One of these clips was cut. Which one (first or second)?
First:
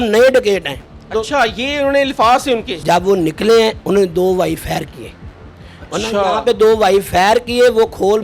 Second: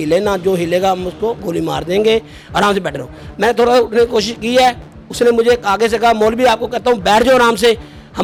first